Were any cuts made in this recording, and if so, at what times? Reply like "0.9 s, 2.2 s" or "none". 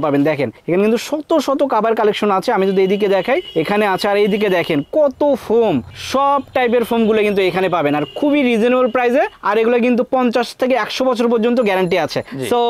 none